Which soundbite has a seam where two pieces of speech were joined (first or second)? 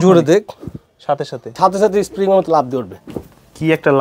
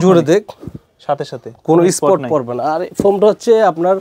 first